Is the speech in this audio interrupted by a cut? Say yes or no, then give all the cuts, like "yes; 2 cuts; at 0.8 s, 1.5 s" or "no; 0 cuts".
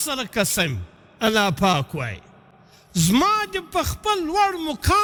no; 0 cuts